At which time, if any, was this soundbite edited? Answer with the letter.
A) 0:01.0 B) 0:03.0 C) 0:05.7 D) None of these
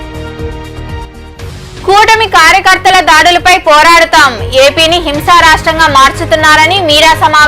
A